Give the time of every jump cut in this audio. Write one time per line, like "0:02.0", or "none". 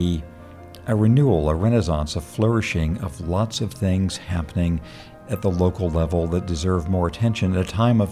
none